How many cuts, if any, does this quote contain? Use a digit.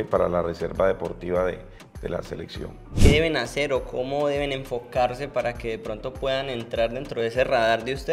1